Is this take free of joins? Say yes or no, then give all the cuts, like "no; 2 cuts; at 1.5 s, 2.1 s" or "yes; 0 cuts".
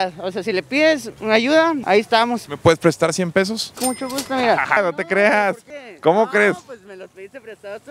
no; 3 cuts; at 2.4 s, 4.8 s, 5.7 s